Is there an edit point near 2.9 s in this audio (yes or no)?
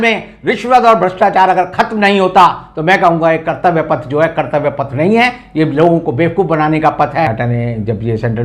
no